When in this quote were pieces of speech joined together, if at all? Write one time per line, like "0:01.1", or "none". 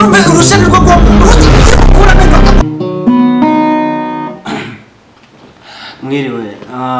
0:02.6